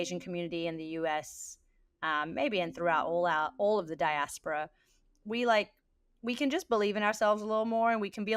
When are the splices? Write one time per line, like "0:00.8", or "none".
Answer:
none